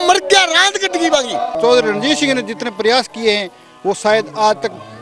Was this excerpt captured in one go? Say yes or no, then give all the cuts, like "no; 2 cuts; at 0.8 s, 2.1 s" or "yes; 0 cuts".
no; 1 cut; at 1.5 s